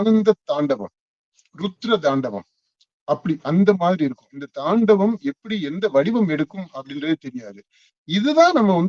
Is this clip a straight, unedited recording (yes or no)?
yes